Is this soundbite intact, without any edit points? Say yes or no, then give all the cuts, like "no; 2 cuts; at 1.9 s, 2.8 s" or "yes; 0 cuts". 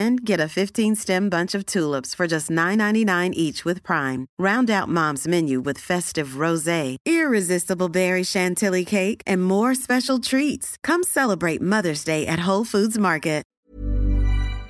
no; 1 cut; at 13.5 s